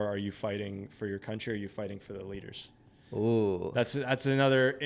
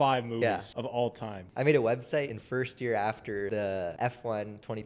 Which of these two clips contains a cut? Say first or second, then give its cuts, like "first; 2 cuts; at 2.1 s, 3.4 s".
second; 3 cuts; at 1.0 s, 2.4 s, 3.9 s